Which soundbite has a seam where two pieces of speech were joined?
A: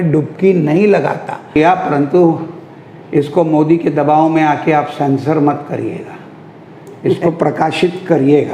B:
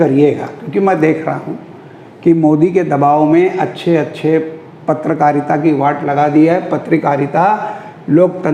A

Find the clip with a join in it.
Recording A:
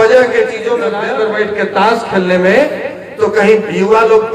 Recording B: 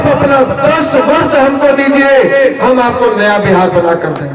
A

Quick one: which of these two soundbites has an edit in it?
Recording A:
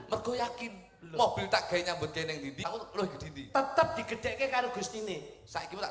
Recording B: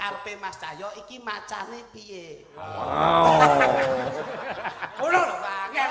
A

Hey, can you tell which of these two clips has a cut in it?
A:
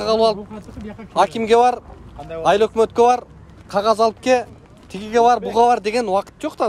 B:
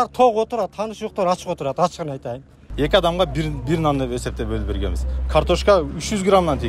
B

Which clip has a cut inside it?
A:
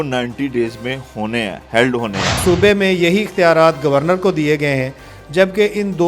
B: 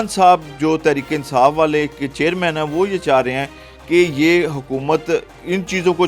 A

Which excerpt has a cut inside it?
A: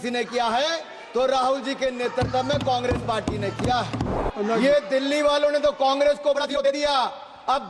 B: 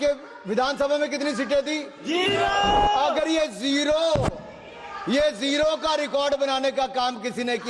A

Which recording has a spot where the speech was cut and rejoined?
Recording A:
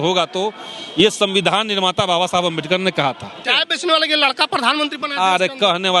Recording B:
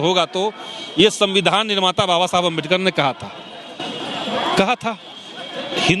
A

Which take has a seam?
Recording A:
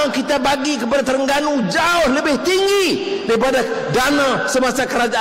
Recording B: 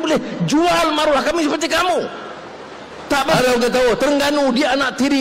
B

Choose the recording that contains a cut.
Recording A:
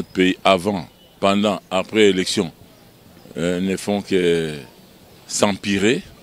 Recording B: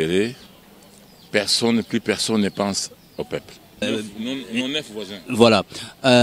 B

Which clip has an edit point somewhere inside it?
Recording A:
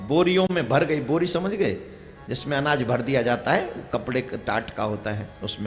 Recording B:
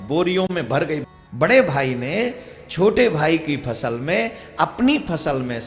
B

